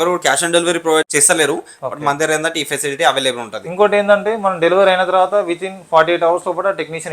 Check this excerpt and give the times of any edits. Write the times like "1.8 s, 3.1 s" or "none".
1.1 s